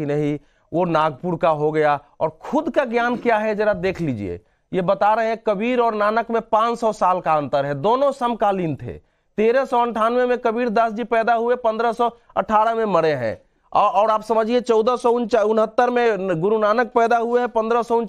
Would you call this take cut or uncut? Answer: uncut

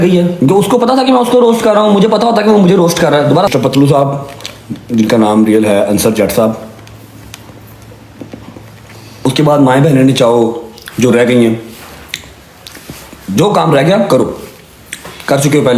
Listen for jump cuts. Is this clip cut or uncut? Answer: cut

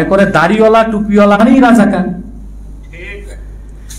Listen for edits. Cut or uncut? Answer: cut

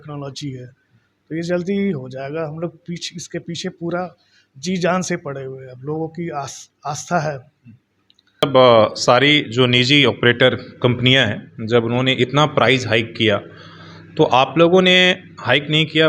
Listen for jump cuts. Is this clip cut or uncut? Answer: cut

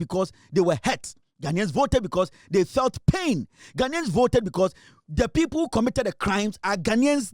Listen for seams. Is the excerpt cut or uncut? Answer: uncut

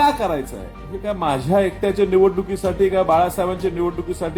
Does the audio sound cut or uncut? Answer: uncut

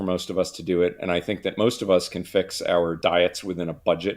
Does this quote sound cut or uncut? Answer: cut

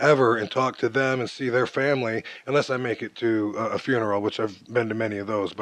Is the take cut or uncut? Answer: cut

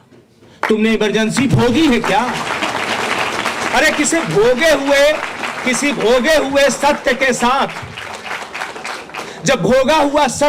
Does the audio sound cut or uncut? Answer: uncut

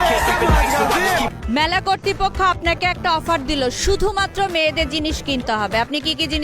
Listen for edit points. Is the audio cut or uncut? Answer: cut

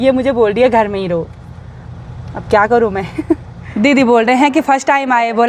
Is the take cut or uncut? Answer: cut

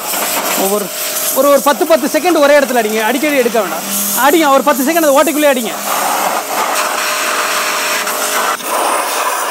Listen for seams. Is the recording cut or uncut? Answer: uncut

